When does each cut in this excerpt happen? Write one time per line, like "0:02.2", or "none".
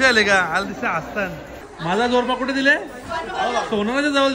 0:01.6